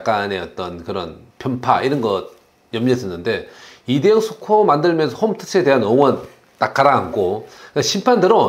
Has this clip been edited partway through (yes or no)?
yes